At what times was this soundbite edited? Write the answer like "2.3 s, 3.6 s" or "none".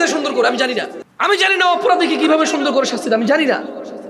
1.0 s

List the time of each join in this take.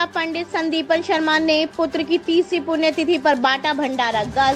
none

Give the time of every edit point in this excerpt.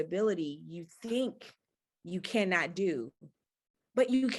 none

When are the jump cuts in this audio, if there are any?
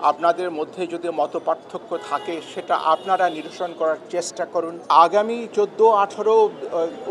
4.9 s

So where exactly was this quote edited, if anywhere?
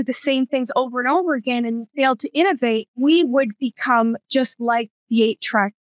1.9 s, 2.9 s

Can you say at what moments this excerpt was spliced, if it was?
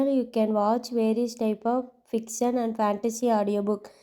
none

